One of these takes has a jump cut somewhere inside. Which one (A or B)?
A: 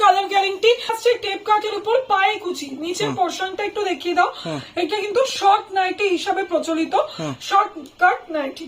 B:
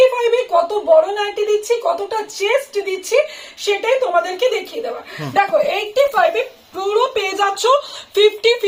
A